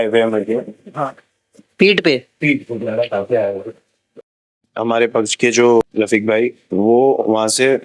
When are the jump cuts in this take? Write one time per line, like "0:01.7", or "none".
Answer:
0:04.6
0:05.8